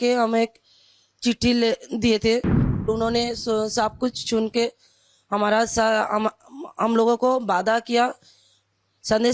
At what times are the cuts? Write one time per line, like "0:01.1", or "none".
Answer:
0:02.9